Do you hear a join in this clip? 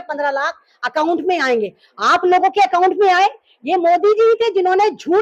no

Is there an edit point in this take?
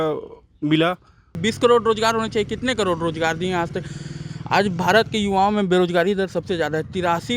yes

